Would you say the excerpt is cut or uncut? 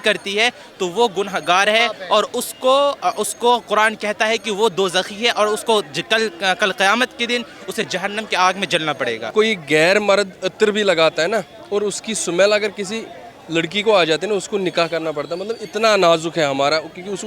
cut